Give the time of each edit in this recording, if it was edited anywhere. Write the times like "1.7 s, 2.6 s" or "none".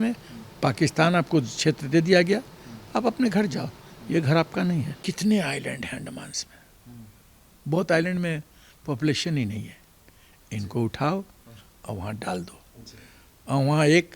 5.0 s